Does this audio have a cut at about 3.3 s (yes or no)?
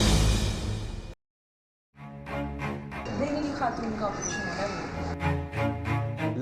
no